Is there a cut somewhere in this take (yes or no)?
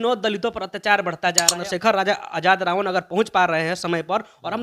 yes